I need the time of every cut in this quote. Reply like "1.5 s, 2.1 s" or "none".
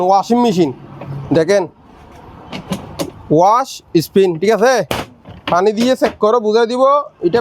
none